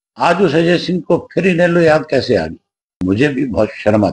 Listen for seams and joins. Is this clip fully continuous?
no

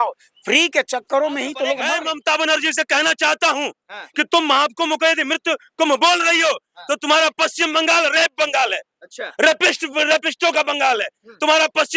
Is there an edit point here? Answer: yes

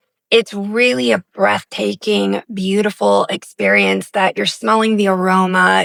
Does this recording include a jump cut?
no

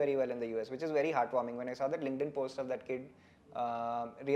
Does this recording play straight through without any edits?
yes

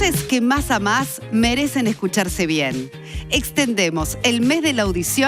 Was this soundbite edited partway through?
no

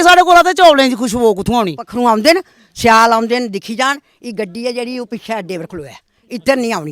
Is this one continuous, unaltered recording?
no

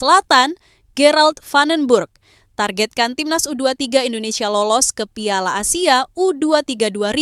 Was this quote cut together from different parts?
no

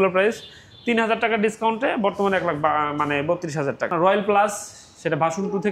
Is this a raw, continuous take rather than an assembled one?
no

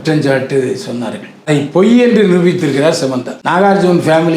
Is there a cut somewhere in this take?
yes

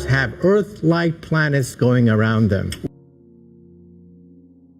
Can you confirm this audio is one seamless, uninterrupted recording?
no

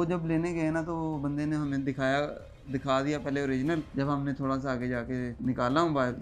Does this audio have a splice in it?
yes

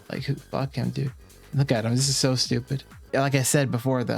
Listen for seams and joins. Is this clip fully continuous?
no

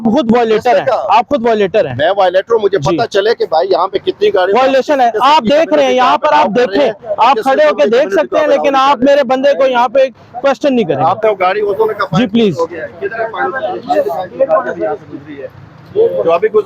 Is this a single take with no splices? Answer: yes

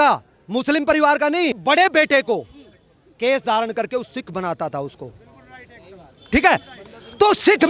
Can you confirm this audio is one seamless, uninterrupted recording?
no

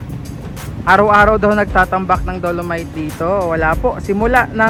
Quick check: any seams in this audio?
no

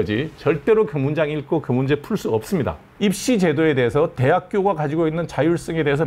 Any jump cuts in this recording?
yes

